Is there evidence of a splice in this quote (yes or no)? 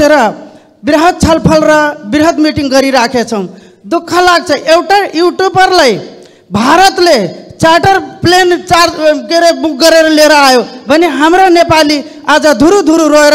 no